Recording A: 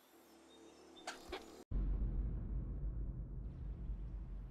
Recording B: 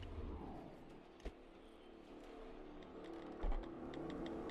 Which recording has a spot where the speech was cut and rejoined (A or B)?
A